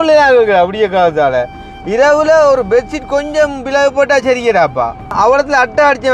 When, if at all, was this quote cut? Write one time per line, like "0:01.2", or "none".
0:05.1